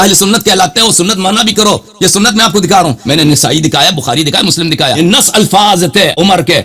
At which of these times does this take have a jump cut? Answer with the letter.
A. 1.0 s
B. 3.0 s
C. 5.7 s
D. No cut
B